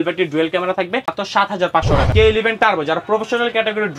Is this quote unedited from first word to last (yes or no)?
no